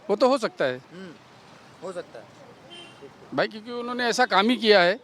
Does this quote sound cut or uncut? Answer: uncut